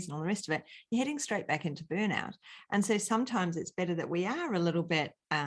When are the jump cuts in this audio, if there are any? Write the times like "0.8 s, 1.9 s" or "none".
none

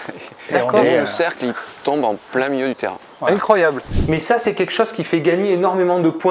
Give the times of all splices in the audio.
3.9 s

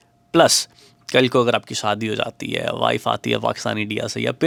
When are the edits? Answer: none

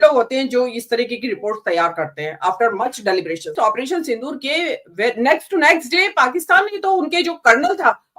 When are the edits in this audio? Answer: 3.5 s

